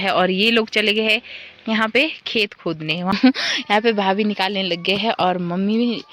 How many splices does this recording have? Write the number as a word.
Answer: one